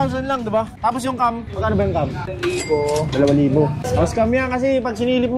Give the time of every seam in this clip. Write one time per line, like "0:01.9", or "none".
0:02.3
0:03.9